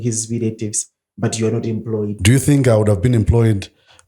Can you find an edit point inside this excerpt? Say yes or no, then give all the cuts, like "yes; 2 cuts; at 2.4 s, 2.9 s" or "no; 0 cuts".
yes; 1 cut; at 2.2 s